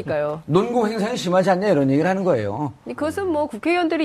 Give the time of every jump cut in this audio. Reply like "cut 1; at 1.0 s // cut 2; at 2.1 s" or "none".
none